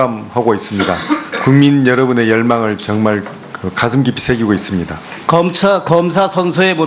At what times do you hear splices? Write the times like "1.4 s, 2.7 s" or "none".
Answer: 5.1 s